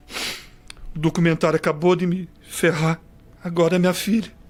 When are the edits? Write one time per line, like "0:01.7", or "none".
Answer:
none